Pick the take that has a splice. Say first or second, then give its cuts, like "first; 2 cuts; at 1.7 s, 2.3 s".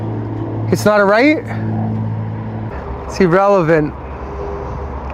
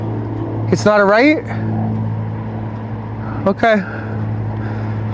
first; 1 cut; at 2.7 s